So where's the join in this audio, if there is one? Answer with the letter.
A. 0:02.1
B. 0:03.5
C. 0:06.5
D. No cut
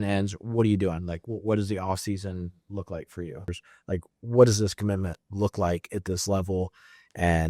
B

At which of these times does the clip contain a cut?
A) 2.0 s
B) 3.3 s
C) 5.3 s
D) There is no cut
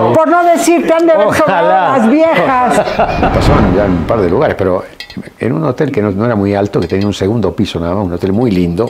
B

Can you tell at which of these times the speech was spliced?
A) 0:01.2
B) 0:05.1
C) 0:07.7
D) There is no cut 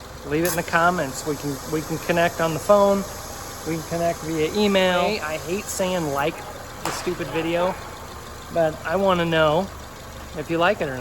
B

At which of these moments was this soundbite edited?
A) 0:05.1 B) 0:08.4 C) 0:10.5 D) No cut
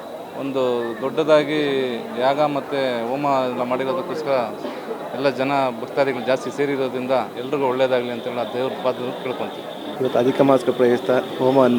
D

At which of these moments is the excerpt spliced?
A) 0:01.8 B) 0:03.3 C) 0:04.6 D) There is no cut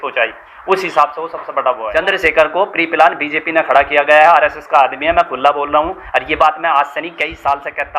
A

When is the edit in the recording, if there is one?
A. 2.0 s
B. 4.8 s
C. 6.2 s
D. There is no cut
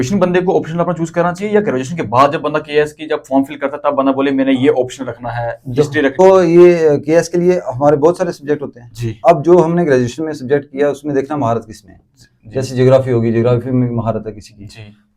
C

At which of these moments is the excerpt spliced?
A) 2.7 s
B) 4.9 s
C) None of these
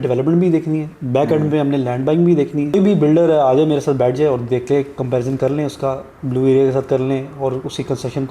A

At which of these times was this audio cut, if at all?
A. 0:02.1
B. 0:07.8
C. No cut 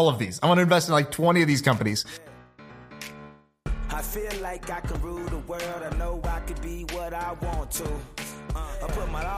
A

